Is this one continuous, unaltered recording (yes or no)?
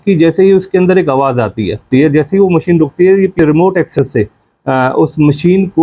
no